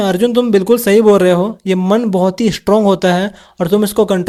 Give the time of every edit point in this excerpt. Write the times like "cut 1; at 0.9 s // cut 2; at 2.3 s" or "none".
none